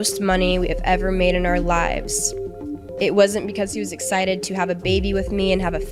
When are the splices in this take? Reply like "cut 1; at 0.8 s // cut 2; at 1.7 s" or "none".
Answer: none